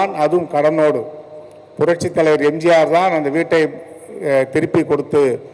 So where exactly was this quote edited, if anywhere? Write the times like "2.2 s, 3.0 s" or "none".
none